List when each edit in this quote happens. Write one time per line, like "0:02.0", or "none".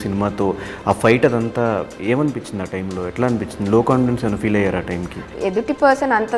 0:05.3